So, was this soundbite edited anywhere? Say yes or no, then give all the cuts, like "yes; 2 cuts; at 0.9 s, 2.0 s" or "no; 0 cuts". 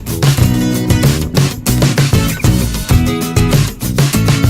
yes; 1 cut; at 2.9 s